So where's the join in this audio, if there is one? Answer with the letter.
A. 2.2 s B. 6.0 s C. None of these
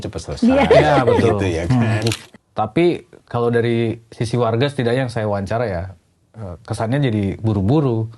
A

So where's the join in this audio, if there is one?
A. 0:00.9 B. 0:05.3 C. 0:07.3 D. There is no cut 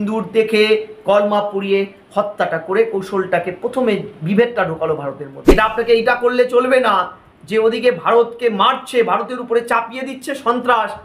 B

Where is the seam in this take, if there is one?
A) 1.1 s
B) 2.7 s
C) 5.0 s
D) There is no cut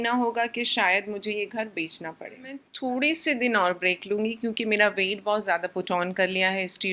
B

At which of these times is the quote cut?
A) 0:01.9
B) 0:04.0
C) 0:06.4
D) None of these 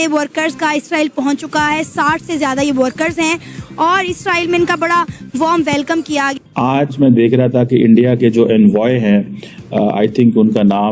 C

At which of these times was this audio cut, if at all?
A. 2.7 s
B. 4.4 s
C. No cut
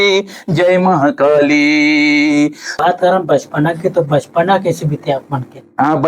A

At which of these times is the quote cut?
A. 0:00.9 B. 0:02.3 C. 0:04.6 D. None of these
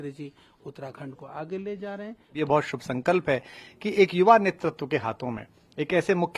B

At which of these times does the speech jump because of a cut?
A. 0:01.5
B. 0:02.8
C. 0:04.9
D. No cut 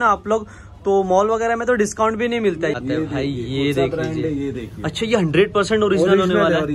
B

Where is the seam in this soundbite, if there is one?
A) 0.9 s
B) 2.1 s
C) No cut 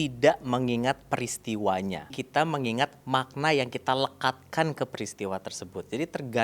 B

